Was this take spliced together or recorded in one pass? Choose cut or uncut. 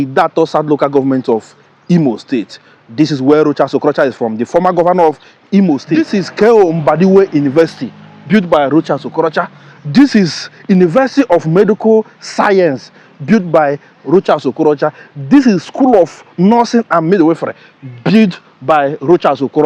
cut